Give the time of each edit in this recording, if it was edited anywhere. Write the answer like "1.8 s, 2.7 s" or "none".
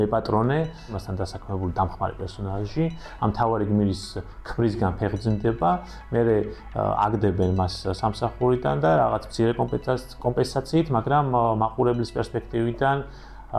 1.0 s